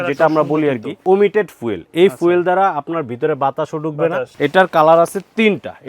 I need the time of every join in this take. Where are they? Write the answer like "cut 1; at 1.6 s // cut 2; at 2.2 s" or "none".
cut 1; at 1.0 s // cut 2; at 4.3 s